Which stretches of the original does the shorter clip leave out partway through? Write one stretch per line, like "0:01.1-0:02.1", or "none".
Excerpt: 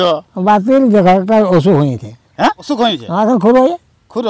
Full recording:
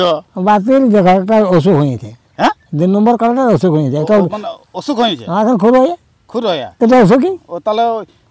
0:02.6-0:04.8